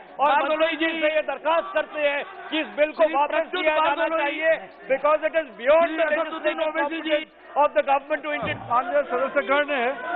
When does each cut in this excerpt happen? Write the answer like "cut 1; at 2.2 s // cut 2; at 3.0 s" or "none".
cut 1; at 8.7 s